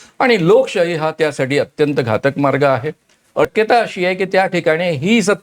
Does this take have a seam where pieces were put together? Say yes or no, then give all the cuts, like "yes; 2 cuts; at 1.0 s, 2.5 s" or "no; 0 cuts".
yes; 1 cut; at 3.5 s